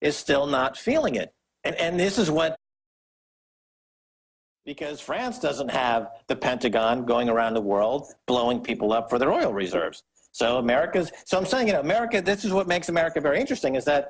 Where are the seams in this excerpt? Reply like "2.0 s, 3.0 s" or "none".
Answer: none